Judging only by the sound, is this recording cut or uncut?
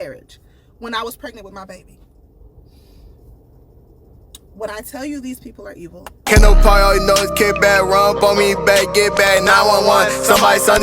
cut